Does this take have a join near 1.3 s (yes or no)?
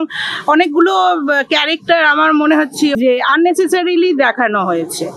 no